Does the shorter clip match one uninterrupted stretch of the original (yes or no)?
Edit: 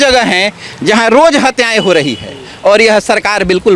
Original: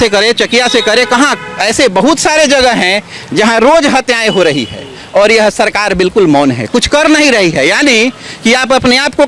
yes